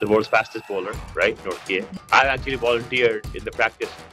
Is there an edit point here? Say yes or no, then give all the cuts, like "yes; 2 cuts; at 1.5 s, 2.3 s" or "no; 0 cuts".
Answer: yes; 1 cut; at 1.9 s